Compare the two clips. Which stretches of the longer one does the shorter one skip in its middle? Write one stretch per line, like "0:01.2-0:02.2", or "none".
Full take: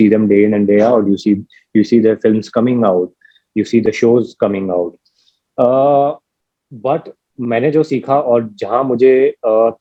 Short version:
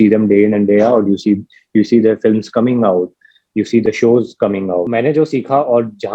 0:04.9-0:07.5